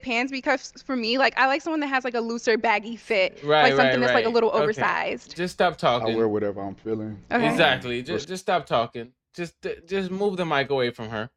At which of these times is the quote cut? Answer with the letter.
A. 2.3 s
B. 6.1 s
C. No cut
C